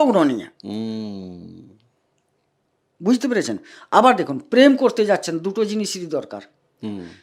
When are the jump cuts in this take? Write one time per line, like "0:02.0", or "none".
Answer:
none